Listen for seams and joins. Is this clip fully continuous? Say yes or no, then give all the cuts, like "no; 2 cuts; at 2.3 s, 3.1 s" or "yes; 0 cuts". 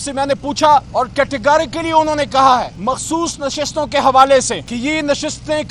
no; 3 cuts; at 0.9 s, 2.7 s, 4.7 s